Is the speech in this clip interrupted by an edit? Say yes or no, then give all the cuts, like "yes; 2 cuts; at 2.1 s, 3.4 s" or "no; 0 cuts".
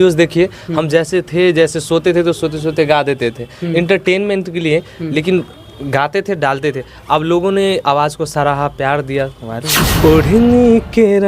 yes; 1 cut; at 9.7 s